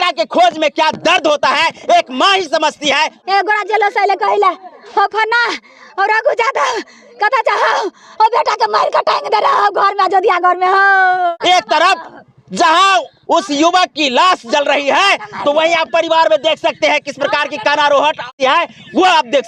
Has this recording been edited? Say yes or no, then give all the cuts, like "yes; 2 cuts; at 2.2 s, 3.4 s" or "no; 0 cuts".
yes; 3 cuts; at 3.2 s, 11.3 s, 18.3 s